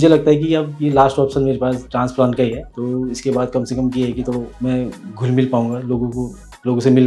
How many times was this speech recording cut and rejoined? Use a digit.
2